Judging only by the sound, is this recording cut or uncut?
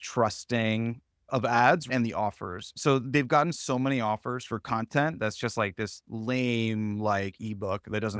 uncut